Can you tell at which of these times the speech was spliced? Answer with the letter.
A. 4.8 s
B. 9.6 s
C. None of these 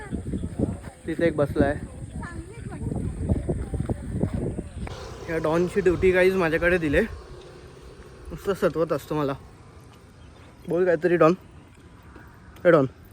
A